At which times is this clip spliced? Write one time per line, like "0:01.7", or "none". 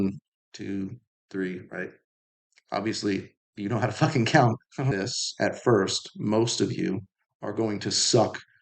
0:04.9